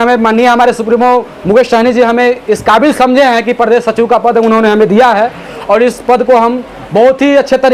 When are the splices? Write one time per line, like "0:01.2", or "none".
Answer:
none